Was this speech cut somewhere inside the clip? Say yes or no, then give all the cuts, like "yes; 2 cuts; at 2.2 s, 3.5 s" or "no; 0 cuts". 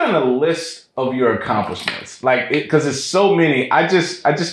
no; 0 cuts